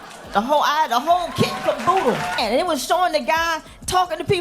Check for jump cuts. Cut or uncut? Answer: cut